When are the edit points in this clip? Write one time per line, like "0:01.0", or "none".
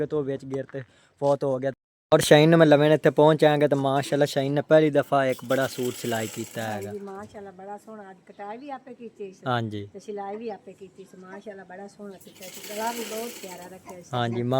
0:01.8